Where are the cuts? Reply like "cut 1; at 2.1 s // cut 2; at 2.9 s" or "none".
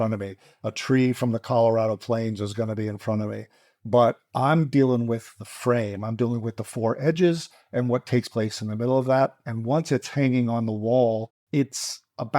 cut 1; at 11.3 s